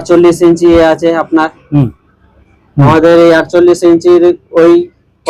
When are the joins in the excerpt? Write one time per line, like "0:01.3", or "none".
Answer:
none